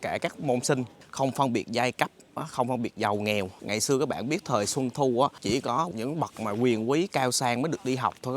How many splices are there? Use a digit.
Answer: 3